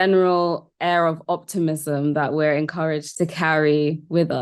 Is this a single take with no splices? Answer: no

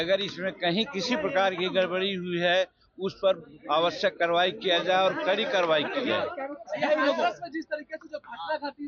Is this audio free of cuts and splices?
yes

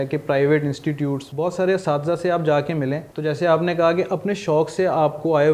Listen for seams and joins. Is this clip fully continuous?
no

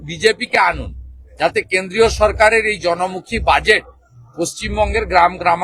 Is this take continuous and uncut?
yes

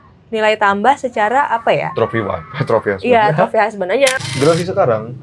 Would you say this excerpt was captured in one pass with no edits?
no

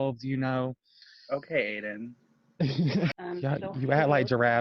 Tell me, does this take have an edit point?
yes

